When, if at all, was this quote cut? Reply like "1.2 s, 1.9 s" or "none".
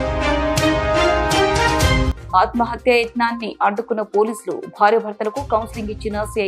2.1 s